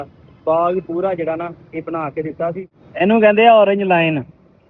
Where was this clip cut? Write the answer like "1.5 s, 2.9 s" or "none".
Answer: 2.8 s